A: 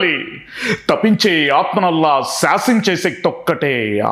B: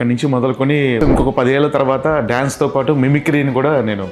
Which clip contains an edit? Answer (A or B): B